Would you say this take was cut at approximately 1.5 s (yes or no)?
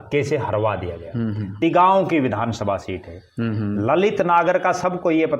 yes